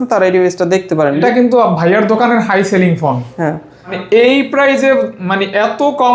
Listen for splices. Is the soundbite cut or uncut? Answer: cut